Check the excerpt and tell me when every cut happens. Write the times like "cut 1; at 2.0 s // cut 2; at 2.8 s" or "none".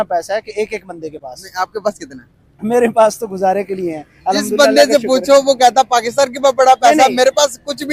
none

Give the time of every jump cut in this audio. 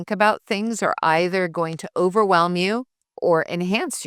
cut 1; at 3.0 s

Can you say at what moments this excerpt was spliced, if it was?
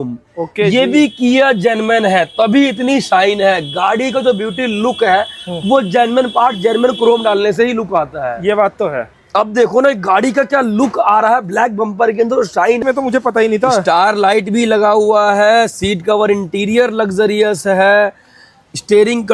cut 1; at 12.8 s

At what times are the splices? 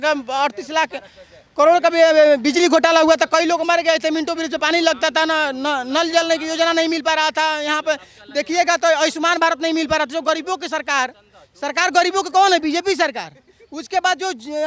none

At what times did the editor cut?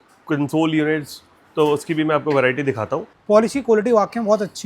cut 1; at 3.1 s

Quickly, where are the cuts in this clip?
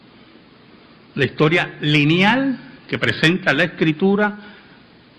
cut 1; at 2.3 s

